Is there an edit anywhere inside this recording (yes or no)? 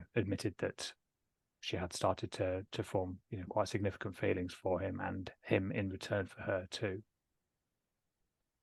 no